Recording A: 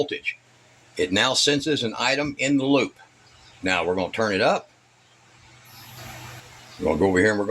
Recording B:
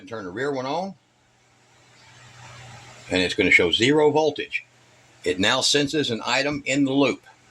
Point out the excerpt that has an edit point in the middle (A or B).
A